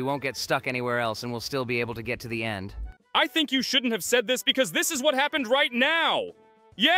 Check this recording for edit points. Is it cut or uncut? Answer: uncut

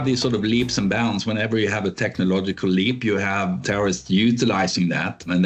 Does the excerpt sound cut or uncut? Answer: uncut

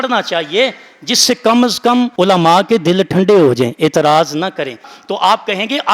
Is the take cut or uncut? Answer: cut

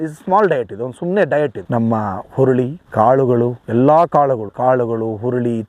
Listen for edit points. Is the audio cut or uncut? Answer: cut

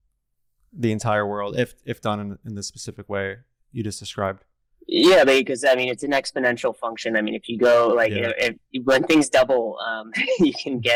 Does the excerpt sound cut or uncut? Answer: uncut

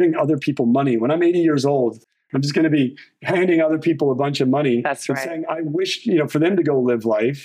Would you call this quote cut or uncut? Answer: uncut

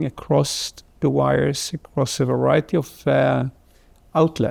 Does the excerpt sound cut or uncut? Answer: uncut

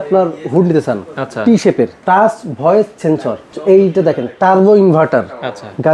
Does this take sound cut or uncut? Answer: cut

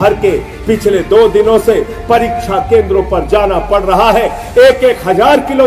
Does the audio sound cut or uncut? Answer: uncut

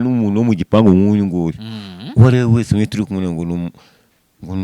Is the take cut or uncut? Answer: uncut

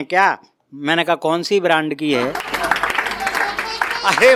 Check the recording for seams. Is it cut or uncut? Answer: uncut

